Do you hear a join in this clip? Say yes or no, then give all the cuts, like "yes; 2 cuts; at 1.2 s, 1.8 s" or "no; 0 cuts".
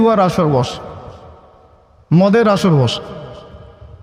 no; 0 cuts